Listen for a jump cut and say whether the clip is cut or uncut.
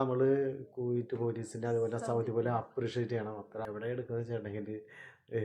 cut